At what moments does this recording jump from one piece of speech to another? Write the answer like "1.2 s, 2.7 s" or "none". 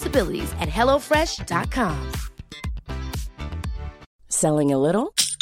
4.1 s